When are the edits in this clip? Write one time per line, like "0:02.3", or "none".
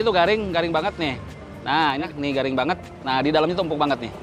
0:02.1

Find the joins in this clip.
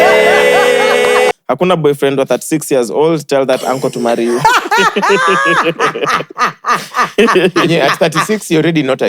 0:01.3

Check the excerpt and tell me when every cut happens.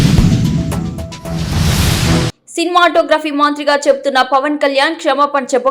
0:02.3

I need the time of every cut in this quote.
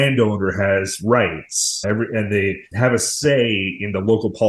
0:01.8
0:02.7

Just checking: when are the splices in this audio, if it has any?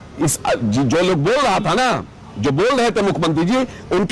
none

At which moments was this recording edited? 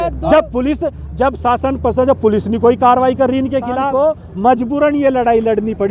0:04.2

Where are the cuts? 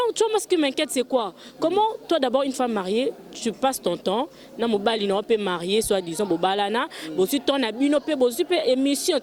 none

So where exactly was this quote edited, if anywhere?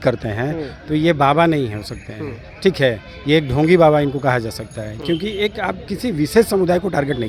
none

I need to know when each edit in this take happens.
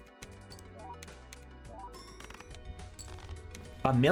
none

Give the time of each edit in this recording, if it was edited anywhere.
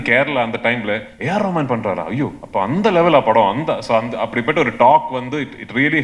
none

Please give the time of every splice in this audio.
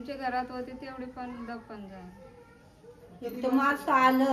none

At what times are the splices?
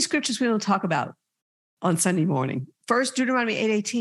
0:02.7

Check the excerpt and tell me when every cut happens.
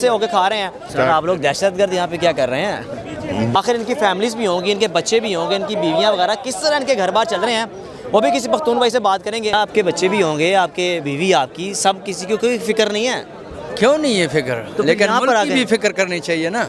0:00.8
0:03.5
0:09.5

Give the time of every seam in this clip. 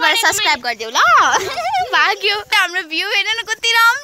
0:02.5

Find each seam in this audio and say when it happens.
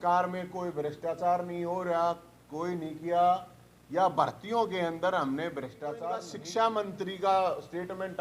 0:06.4

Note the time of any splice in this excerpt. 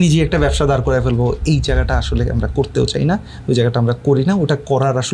none

